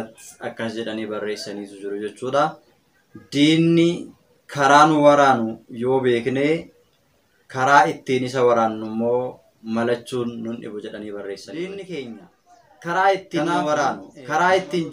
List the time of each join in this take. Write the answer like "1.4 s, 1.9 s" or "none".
11.5 s